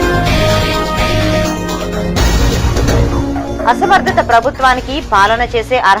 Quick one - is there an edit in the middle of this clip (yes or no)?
no